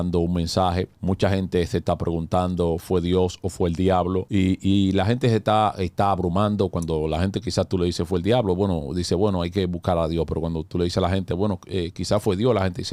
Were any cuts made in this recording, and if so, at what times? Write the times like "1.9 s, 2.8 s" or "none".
0.9 s, 4.3 s